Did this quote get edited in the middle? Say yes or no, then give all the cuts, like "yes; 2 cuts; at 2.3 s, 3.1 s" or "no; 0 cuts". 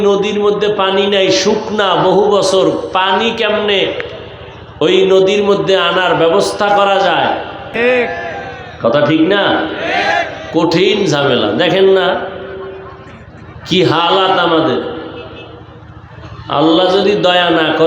yes; 1 cut; at 7.7 s